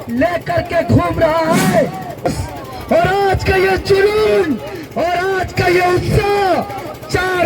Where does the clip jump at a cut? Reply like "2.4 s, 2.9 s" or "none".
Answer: 2.3 s